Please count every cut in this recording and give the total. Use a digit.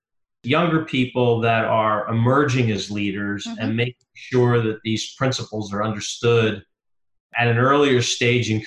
0